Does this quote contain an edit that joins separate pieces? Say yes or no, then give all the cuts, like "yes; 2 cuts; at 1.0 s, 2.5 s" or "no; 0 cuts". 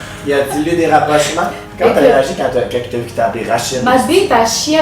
yes; 1 cut; at 1.6 s